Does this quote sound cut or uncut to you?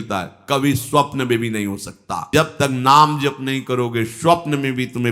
cut